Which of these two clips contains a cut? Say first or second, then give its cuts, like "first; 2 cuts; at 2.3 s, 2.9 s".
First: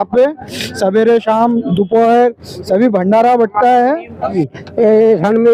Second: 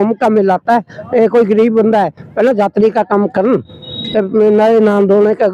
first; 1 cut; at 4.3 s